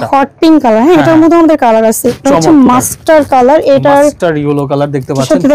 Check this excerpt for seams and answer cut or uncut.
cut